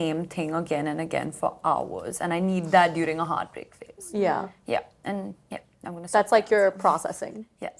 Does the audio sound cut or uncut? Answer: uncut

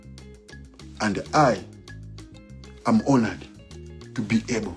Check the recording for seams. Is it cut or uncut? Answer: cut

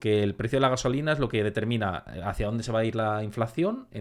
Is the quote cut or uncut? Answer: uncut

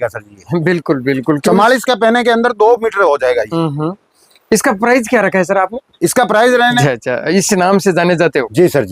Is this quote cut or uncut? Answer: cut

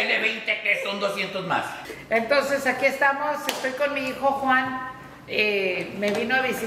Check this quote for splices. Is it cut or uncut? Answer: cut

